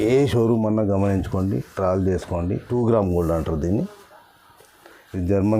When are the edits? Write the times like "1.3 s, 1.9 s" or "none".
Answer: 2.7 s